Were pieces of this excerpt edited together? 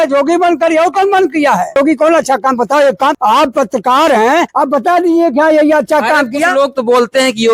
yes; 3 cuts; at 1.8 s, 3.2 s, 4.5 s

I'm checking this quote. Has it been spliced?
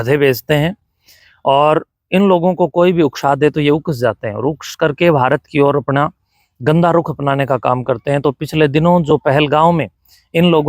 no; 0 cuts

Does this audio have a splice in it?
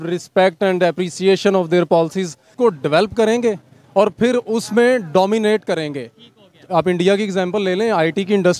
yes; 1 cut; at 2.5 s

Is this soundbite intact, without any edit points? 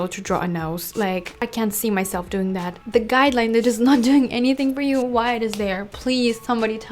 no; 1 cut; at 2.8 s

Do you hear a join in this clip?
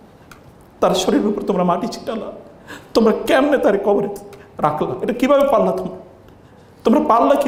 no; 0 cuts

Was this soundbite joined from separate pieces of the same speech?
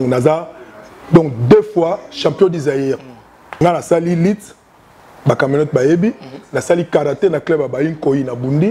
yes; 1 cut; at 3.6 s

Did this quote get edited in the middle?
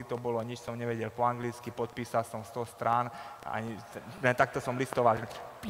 no; 0 cuts

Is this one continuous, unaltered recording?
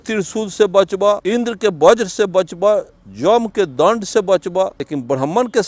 no; 2 cuts; at 1.2 s, 4.8 s

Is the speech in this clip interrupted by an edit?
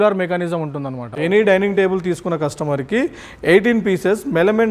yes; 1 cut; at 1.1 s

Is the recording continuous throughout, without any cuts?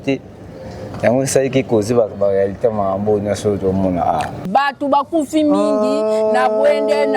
no; 1 cut; at 4.5 s

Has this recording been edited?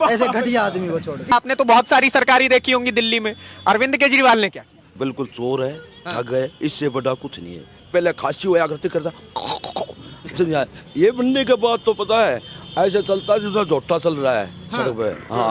yes; 3 cuts; at 1.3 s, 4.9 s, 7.8 s

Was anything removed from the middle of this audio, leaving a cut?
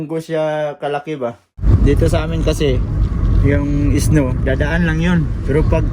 yes; 1 cut; at 1.6 s

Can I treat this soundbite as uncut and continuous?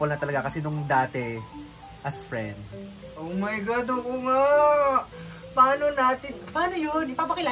yes; 0 cuts

